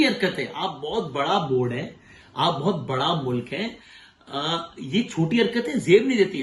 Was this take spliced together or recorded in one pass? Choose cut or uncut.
uncut